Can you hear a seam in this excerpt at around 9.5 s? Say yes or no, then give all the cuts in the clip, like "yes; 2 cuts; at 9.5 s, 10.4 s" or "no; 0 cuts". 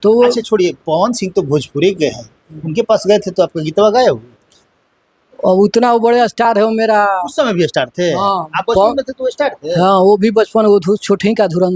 no; 0 cuts